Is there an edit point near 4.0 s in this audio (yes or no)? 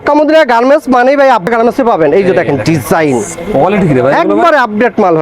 no